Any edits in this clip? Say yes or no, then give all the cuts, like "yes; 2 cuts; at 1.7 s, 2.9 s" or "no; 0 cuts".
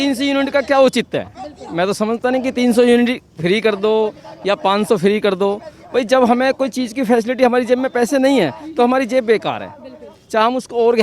no; 0 cuts